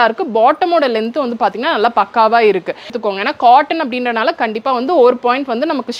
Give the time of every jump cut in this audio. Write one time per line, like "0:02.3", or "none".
0:02.9